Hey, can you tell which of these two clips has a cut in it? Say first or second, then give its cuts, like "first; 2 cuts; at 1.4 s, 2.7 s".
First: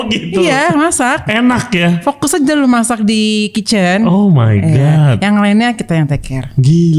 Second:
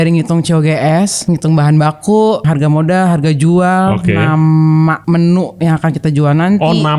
second; 3 cuts; at 1.2 s, 2.4 s, 5.0 s